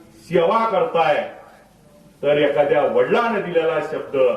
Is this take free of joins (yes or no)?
yes